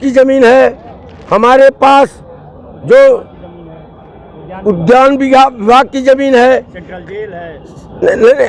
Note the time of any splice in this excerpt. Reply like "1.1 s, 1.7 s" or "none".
none